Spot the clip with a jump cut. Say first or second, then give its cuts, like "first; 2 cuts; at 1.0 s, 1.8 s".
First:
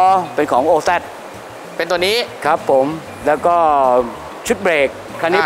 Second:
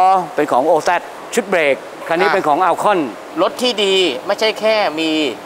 second; 2 cuts; at 1.2 s, 3.2 s